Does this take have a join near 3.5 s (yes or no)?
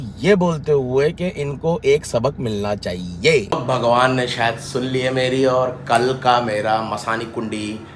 yes